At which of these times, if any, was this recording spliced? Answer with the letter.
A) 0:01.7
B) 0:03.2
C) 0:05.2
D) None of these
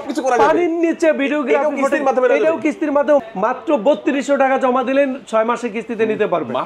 B